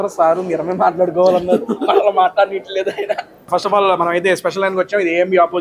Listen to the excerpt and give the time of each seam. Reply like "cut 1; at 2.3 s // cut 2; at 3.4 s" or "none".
cut 1; at 3.5 s

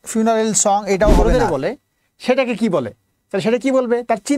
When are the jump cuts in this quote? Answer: cut 1; at 1.5 s

